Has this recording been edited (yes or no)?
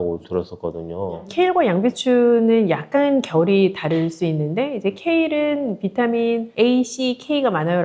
no